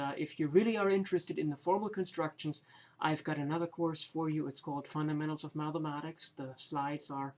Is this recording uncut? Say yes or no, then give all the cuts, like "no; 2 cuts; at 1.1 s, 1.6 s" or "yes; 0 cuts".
no; 1 cut; at 1.6 s